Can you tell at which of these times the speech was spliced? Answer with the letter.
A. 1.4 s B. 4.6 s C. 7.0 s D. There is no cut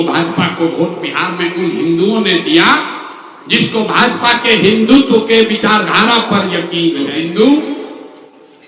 C